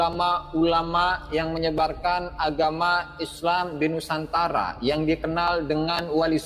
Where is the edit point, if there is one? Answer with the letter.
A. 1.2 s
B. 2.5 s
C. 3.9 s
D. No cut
D